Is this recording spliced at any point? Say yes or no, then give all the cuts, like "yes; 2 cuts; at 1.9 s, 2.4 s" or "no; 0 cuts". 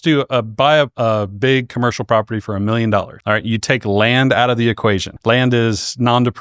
yes; 3 cuts; at 0.9 s, 3.1 s, 5.1 s